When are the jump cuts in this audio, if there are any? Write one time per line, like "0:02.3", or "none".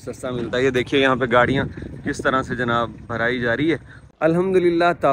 0:04.0